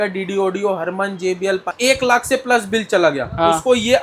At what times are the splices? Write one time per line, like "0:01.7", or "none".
0:01.7